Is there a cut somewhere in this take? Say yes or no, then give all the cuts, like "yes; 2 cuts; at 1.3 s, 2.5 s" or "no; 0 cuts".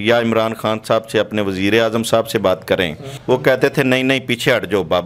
yes; 1 cut; at 3.1 s